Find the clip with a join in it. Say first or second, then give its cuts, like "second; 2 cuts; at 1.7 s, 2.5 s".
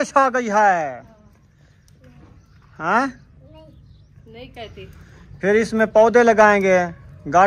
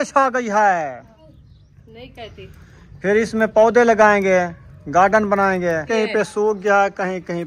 second; 2 cuts; at 1.2 s, 5.9 s